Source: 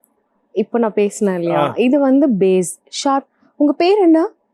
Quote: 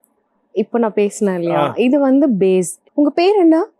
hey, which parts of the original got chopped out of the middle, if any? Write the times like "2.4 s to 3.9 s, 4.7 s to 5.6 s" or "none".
2.8 s to 3.4 s